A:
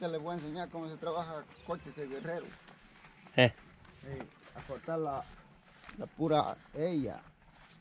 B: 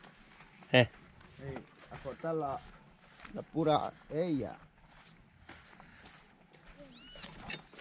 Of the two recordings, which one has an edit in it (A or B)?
B